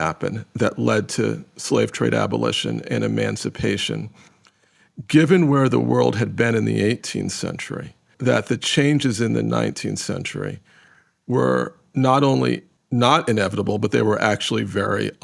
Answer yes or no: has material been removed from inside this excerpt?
yes